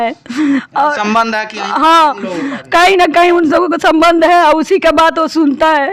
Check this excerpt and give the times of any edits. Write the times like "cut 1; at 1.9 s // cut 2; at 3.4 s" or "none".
none

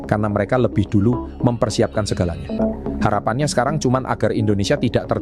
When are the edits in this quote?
cut 1; at 2.5 s

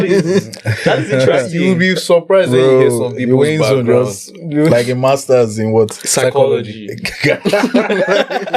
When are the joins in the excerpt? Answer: none

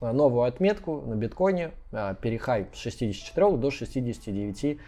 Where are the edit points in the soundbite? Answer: none

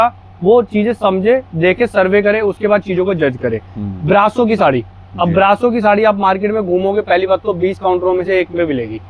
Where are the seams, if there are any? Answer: none

